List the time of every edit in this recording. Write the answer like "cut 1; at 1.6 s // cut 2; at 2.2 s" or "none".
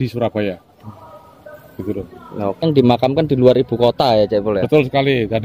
cut 1; at 2.6 s